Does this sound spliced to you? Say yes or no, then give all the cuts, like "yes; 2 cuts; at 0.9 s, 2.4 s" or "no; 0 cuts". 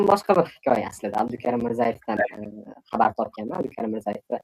yes; 1 cut; at 3.5 s